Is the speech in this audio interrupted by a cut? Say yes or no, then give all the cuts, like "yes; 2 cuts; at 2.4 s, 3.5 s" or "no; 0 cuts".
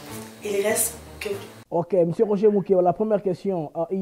yes; 1 cut; at 1.5 s